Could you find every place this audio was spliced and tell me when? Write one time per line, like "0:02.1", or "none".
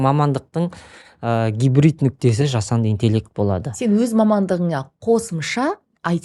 none